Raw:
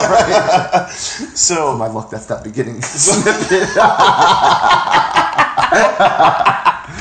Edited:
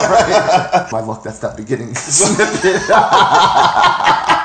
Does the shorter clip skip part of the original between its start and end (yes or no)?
yes